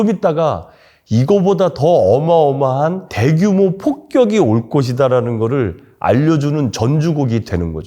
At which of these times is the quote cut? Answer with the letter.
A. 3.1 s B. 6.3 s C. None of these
A